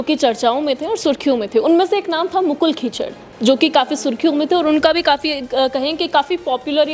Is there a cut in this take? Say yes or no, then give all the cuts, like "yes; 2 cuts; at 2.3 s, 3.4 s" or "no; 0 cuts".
no; 0 cuts